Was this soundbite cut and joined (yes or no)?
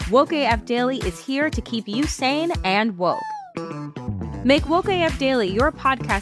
no